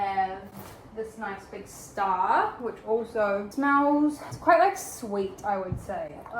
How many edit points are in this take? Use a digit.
1